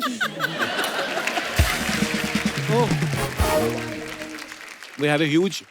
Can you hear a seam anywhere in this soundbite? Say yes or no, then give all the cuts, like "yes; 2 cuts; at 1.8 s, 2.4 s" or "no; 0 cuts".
no; 0 cuts